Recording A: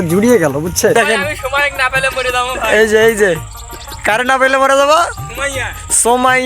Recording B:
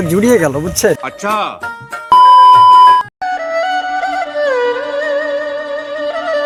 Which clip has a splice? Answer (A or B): A